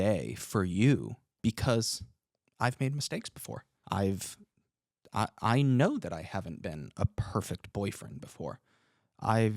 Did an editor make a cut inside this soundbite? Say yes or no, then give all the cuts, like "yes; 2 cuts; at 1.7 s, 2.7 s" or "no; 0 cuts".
yes; 2 cuts; at 1.2 s, 3.7 s